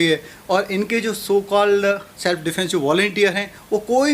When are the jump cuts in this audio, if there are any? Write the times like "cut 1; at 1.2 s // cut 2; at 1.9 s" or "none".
cut 1; at 2.1 s